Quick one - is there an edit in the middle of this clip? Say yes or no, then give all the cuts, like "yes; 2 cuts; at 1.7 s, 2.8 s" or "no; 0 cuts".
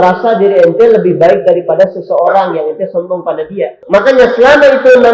yes; 1 cut; at 3.7 s